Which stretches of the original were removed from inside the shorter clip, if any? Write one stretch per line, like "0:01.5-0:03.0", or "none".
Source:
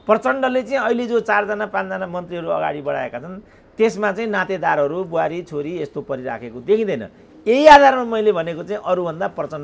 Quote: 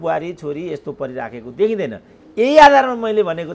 none

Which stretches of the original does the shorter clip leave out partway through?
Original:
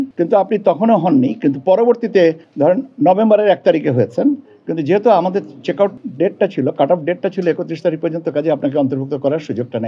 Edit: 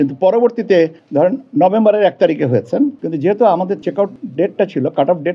0:04.5-0:04.7
0:05.5-0:05.6

